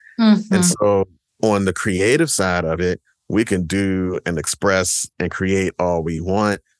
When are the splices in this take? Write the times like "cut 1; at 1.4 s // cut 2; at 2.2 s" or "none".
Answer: cut 1; at 1.2 s